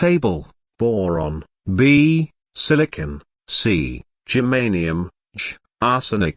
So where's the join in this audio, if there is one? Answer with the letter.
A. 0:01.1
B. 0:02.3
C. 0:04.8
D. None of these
A